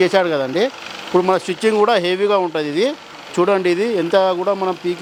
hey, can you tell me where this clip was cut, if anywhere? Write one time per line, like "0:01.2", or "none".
none